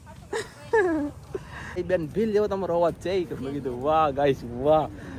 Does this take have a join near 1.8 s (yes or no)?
yes